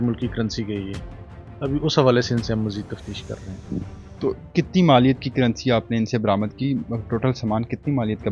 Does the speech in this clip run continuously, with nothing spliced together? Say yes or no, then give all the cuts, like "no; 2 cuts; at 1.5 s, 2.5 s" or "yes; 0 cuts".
yes; 0 cuts